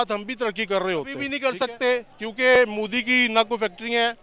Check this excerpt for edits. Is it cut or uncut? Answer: cut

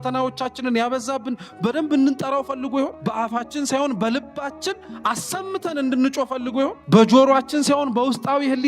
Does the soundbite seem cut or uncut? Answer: cut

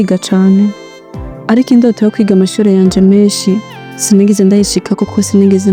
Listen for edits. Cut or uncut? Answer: uncut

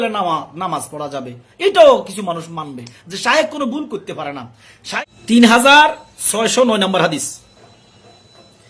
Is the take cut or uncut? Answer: cut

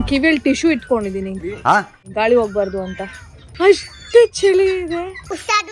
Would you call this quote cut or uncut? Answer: cut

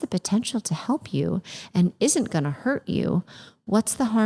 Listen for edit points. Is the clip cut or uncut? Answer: uncut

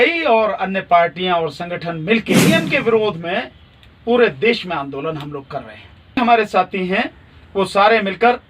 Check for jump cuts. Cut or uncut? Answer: cut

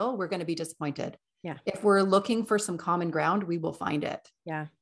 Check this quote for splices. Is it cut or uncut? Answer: uncut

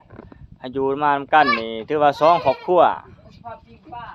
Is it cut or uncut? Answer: uncut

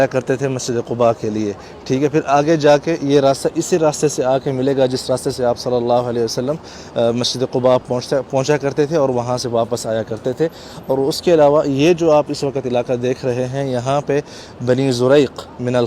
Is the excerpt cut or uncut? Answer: uncut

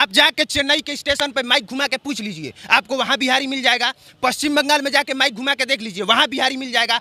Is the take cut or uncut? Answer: uncut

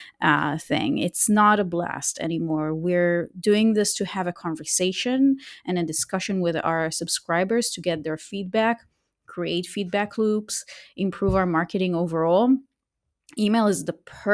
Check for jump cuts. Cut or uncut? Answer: uncut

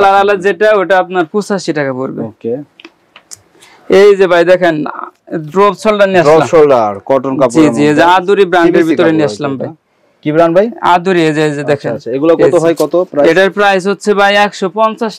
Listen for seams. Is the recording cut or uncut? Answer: uncut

